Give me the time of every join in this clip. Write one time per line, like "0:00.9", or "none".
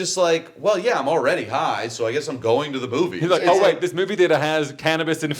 none